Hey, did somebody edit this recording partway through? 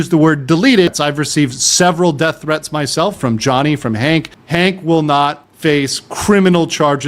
yes; 2 cuts; at 0.9 s, 4.4 s

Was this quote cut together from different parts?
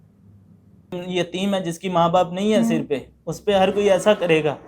yes; 1 cut; at 0.9 s

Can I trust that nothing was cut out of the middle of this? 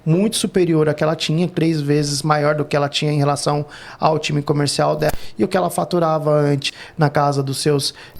no; 2 cuts; at 5.1 s, 6.6 s

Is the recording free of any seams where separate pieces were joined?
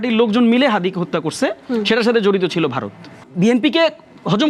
no; 1 cut; at 3.2 s

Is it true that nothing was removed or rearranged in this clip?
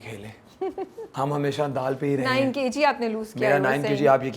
no; 1 cut; at 1.1 s

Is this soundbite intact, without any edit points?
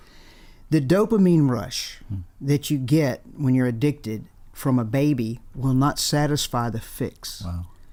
yes; 0 cuts

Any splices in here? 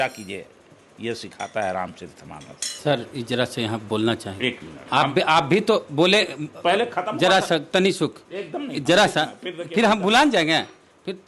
yes; 1 cut; at 2.8 s

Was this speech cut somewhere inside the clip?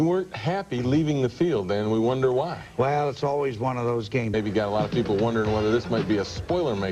no; 0 cuts

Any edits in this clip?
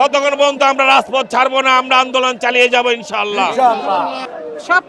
no; 0 cuts

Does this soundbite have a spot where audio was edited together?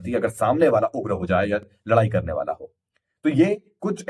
no; 0 cuts

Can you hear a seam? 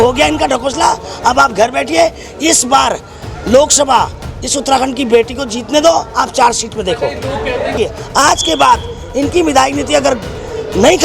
yes; 1 cut; at 7.7 s

